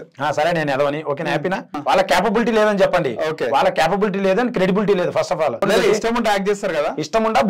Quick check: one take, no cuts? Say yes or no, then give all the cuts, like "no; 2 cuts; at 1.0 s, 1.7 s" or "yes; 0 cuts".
no; 2 cuts; at 1.7 s, 5.6 s